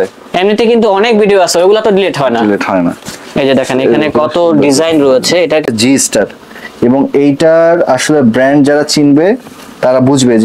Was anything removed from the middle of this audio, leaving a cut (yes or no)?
yes